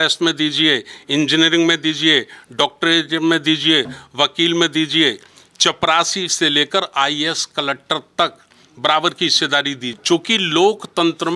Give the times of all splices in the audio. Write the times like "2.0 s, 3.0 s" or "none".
9.9 s